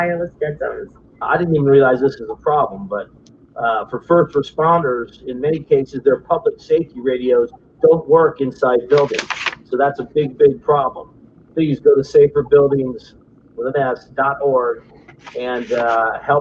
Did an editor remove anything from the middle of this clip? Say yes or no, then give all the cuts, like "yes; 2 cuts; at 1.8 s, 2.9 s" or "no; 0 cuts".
no; 0 cuts